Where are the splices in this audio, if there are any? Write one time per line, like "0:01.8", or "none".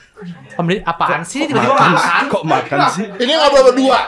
0:03.1

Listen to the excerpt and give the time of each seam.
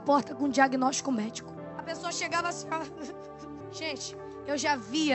0:01.6
0:03.6

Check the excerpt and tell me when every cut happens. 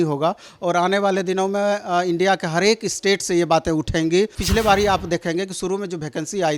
0:04.4

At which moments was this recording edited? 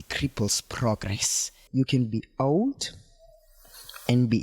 0:01.6

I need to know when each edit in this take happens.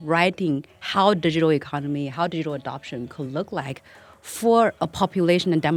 none

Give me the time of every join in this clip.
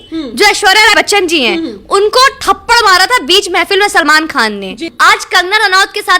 0:00.9
0:04.9

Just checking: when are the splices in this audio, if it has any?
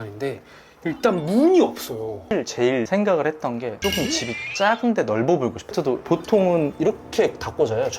0:02.2
0:05.8

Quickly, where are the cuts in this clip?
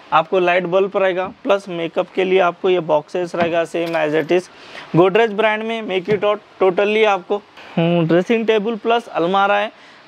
none

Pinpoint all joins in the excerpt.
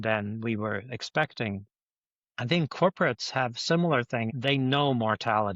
0:04.3

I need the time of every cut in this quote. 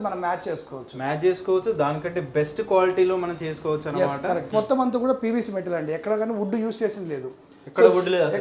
0:04.5

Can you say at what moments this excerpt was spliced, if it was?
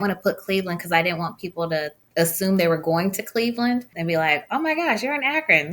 0:02.0
0:03.9

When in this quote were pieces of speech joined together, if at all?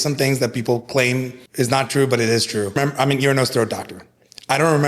0:01.4
0:02.8

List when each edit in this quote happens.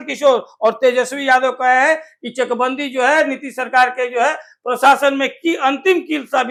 none

